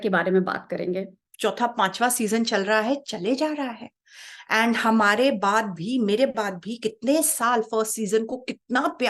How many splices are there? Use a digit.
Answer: 1